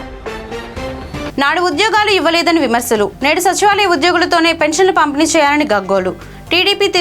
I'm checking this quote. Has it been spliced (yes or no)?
yes